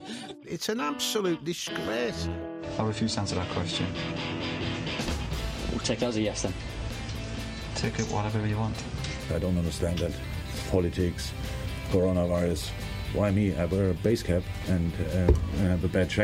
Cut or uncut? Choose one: uncut